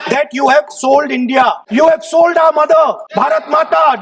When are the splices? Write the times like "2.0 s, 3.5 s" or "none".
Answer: 1.6 s, 3.0 s